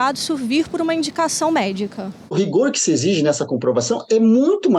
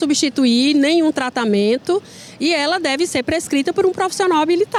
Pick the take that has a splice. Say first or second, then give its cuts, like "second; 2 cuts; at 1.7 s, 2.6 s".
first; 1 cut; at 2.3 s